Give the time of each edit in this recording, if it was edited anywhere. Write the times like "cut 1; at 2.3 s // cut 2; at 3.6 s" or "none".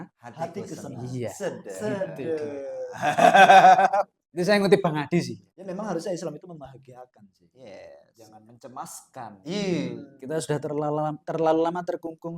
none